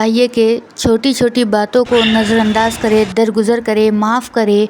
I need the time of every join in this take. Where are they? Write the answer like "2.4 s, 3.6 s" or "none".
none

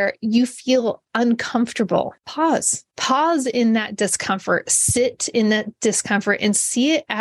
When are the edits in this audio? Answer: 2.5 s

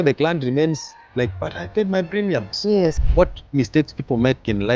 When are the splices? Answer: 3.1 s

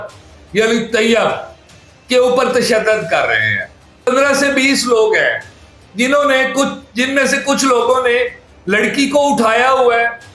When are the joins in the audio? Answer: 4.1 s

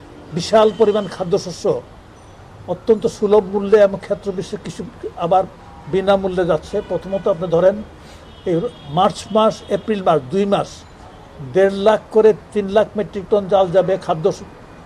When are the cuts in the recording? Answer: none

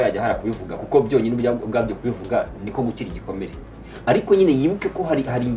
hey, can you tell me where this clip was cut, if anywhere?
none

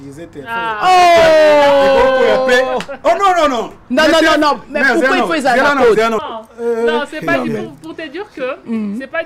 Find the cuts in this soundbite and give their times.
6.3 s

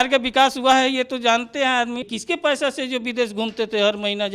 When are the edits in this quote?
2.1 s

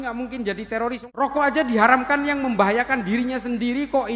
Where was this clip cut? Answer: 1.0 s

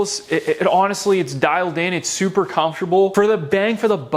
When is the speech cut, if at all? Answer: none

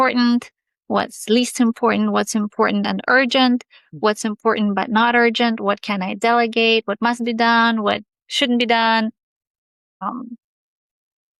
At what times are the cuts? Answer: none

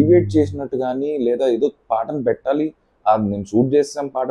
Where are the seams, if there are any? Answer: none

